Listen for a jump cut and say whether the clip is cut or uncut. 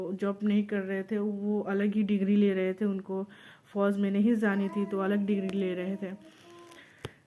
uncut